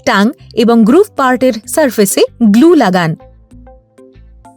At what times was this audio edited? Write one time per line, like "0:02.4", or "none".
0:03.2